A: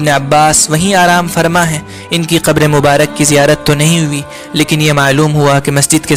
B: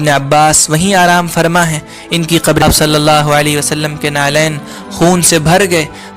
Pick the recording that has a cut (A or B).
B